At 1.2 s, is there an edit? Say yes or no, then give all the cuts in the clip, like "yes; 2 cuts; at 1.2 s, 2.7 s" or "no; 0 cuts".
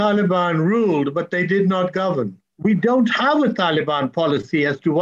no; 1 cut; at 2.4 s